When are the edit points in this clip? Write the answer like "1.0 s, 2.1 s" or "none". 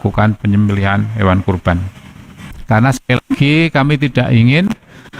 2.5 s